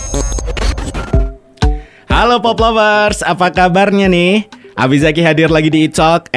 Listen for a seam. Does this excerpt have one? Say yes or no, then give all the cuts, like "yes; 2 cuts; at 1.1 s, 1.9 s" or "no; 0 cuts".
yes; 1 cut; at 1.1 s